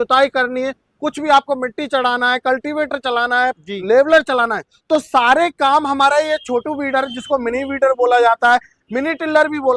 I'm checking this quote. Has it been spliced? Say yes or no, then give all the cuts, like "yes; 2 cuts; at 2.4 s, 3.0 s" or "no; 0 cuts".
no; 0 cuts